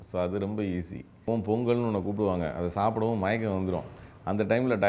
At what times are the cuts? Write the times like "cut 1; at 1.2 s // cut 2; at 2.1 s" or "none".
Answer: cut 1; at 1.3 s

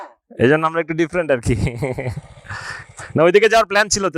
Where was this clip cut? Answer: none

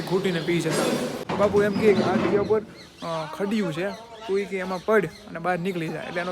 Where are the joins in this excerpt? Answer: cut 1; at 1.2 s

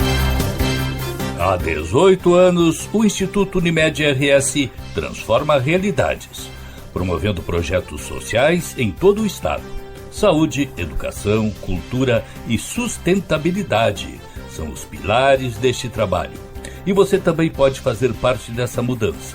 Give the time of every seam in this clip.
cut 1; at 1.3 s

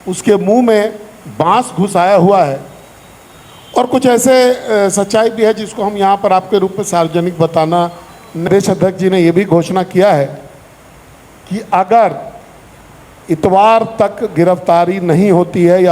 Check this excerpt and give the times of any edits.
cut 1; at 8.5 s

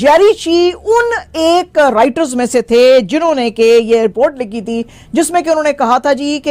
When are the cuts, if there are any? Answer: cut 1; at 4.1 s

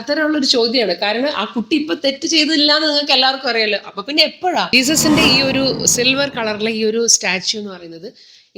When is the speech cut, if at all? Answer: cut 1; at 4.7 s

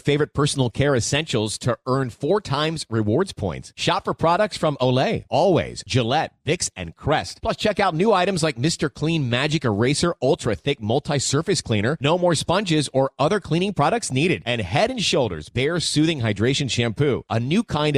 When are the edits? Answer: none

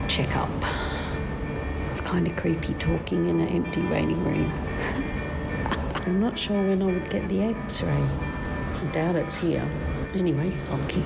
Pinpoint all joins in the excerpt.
cut 1; at 1.2 s // cut 2; at 6.0 s // cut 3; at 8.4 s // cut 4; at 10.1 s

